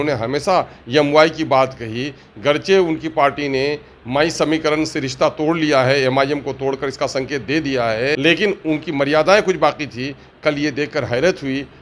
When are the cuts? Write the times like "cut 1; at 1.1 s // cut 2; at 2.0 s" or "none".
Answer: cut 1; at 8.2 s